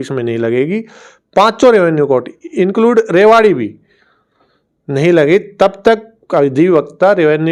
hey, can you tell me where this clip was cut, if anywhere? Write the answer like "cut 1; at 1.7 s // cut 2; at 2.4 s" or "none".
none